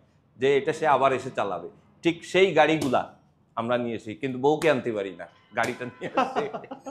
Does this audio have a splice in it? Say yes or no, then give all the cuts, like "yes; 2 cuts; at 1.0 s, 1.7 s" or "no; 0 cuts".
no; 0 cuts